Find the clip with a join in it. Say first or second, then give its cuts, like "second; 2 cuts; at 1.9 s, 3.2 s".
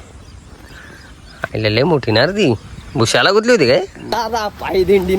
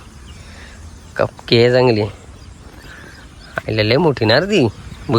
first; 1 cut; at 4.0 s